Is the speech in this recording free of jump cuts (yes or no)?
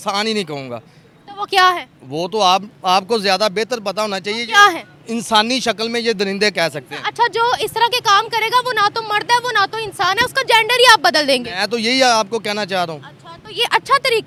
yes